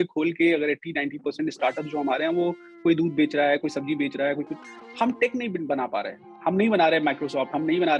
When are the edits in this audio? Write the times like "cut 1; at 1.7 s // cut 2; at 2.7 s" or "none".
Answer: cut 1; at 6.2 s